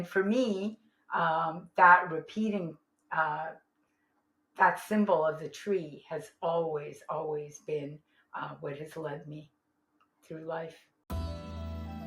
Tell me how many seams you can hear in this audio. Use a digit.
1